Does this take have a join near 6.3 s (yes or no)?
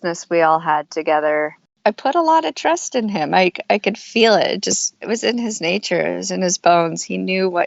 no